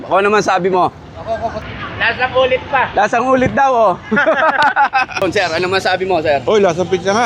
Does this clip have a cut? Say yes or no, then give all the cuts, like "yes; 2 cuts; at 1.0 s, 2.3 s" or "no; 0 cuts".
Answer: yes; 2 cuts; at 1.7 s, 5.2 s